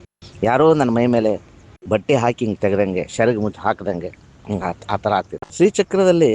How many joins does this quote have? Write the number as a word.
one